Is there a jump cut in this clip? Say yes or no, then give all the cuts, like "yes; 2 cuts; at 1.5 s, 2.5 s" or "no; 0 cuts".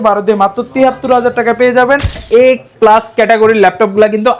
yes; 1 cut; at 2.2 s